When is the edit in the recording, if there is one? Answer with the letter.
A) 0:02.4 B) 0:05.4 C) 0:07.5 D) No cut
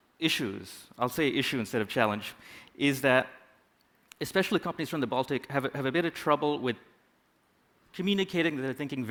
D